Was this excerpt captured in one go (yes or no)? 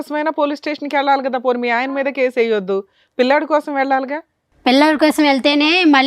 yes